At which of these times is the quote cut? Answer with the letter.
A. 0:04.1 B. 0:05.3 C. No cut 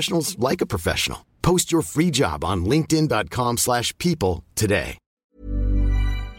B